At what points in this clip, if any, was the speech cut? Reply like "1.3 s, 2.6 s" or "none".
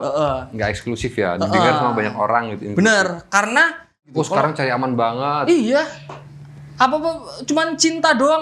4.1 s